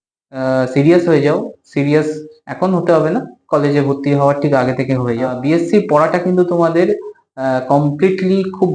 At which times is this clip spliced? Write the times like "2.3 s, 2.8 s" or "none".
5.3 s